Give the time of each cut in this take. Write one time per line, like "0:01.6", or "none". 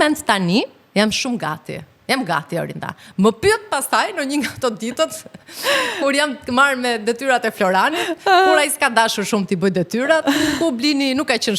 none